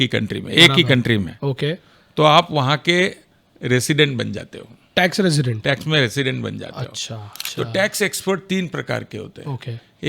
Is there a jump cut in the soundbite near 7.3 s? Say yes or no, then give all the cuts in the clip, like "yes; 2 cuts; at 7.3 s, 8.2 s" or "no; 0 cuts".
yes; 1 cut; at 7.3 s